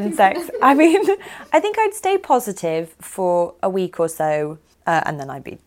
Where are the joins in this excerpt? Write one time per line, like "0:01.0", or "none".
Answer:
0:04.7